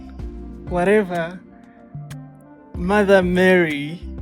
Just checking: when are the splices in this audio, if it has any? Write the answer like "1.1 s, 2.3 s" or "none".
none